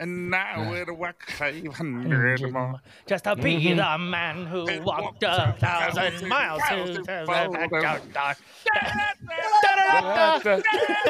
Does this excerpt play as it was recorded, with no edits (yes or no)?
yes